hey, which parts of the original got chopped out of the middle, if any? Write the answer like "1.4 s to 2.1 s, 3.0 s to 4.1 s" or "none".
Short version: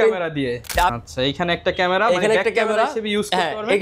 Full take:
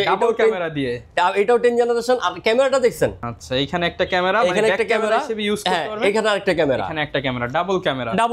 1.3 s to 3.3 s